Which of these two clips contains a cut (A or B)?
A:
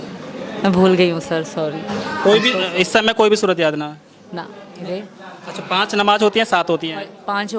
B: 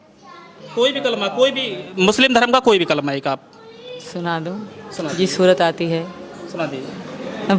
A